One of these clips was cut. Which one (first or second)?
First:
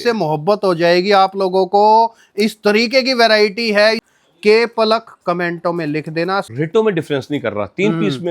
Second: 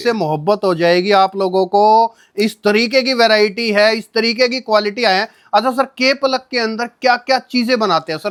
first